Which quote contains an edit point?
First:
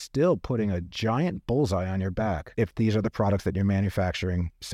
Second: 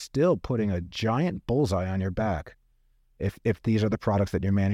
first; 1 cut; at 2.5 s

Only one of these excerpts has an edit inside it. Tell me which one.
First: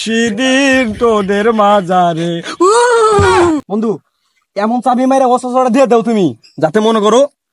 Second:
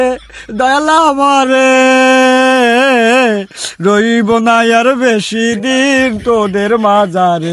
first; 1 cut; at 3.6 s

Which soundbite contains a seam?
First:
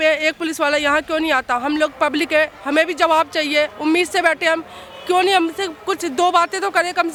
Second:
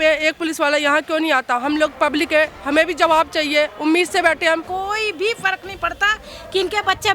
second; 1 cut; at 4.7 s

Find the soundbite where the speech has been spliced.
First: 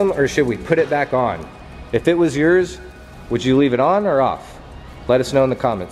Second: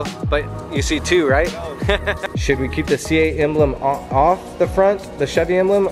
second; 1 cut; at 2.3 s

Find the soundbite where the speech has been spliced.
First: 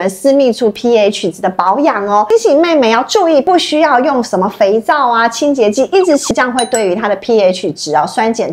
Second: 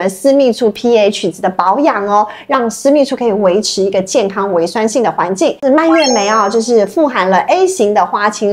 first; 3 cuts; at 2.3 s, 3.4 s, 6.3 s

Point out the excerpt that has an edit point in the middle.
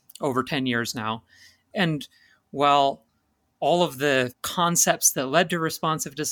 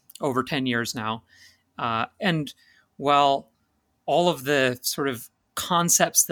first; 2 cuts; at 1.7 s, 4.4 s

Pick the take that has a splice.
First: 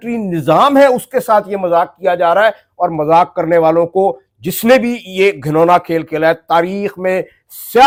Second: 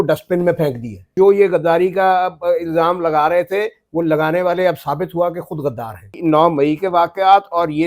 second; 2 cuts; at 1.1 s, 6.1 s

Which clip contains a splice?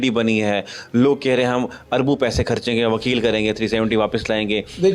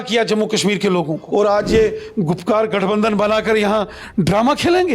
second; 1 cut; at 1.2 s

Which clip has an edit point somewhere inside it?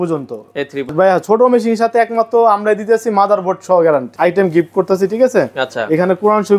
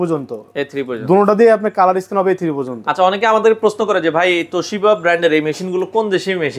first; 2 cuts; at 0.9 s, 4.1 s

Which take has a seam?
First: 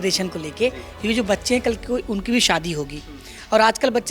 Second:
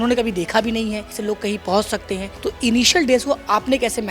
second; 2 cuts; at 1.1 s, 2.3 s

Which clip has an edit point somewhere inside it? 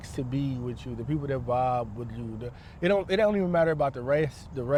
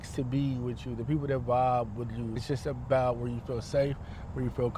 second; 1 cut; at 2.4 s

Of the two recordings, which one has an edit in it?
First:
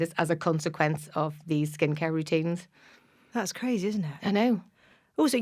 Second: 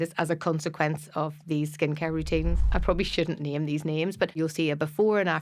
second; 2 cuts; at 2.7 s, 4.4 s

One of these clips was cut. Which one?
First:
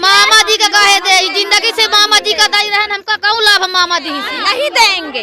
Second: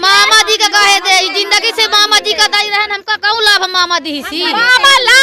first; 1 cut; at 4.2 s

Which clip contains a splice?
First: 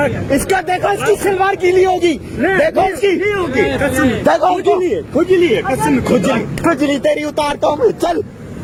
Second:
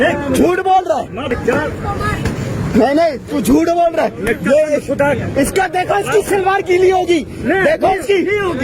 second; 1 cut; at 1.3 s

